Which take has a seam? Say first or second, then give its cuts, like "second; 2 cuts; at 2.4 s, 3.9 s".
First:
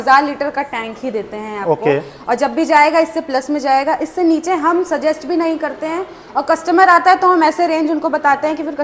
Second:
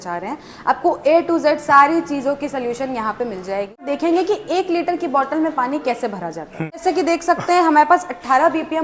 second; 2 cuts; at 3.8 s, 6.8 s